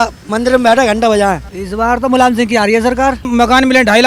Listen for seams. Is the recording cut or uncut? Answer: cut